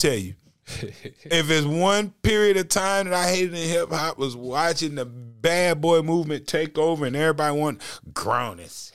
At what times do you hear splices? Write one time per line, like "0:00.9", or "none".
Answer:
none